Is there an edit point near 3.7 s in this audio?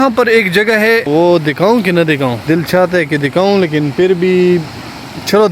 no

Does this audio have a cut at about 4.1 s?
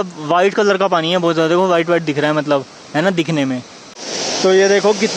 yes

